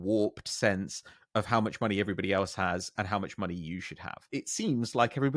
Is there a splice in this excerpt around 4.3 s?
yes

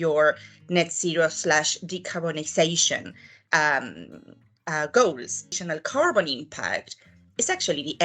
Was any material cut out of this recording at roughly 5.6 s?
yes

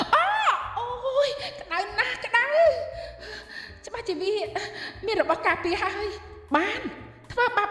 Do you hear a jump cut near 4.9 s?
no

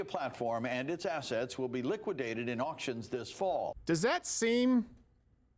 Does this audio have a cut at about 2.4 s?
no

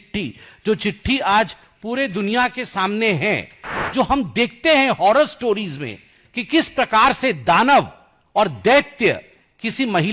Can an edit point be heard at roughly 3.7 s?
yes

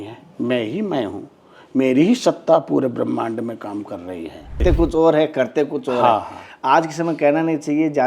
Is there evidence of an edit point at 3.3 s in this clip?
no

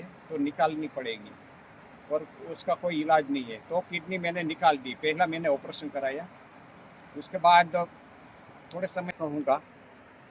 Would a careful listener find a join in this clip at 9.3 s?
yes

